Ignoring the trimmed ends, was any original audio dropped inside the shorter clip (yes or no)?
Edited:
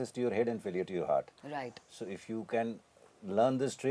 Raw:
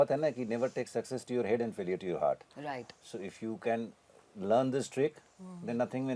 no